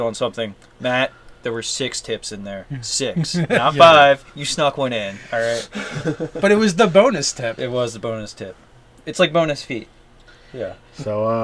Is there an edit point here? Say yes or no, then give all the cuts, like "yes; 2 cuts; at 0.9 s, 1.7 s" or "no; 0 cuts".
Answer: yes; 1 cut; at 5.3 s